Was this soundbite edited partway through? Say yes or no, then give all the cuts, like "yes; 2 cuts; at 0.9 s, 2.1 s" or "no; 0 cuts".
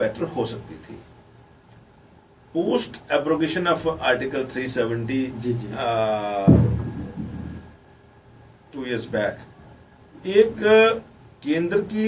no; 0 cuts